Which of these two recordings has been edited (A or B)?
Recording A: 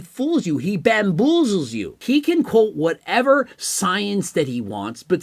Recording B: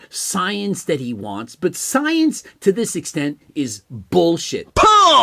A